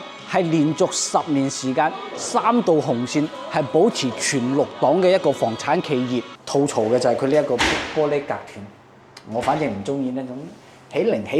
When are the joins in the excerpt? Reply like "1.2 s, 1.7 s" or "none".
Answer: 6.4 s